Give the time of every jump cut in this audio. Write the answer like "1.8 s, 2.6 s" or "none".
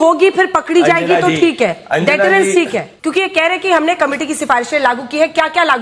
2.9 s

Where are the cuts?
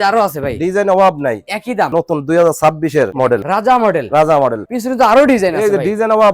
1.9 s, 3.4 s, 4.7 s

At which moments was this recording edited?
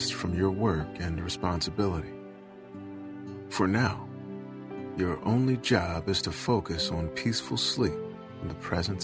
none

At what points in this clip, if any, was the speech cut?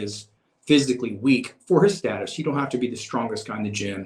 none

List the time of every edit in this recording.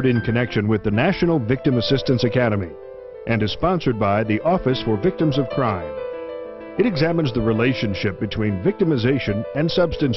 7.3 s

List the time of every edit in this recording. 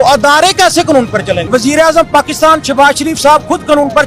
1.5 s

